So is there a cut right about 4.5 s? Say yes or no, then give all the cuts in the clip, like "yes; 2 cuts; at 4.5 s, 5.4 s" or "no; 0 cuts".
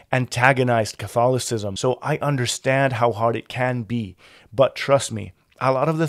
no; 1 cut; at 1.7 s